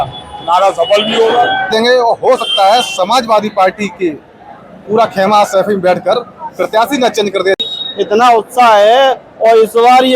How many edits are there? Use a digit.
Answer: 2